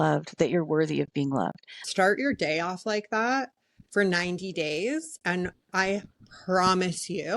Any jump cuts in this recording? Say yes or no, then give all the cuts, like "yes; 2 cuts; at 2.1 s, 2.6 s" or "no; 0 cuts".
yes; 1 cut; at 1.8 s